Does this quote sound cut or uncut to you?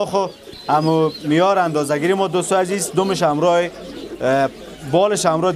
uncut